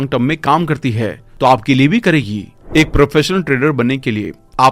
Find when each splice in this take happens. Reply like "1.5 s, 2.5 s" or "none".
2.5 s